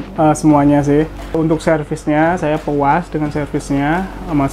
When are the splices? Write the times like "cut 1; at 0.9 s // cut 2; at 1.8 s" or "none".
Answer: cut 1; at 1.4 s